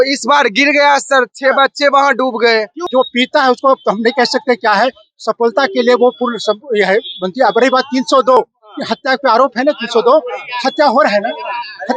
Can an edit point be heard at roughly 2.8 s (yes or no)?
yes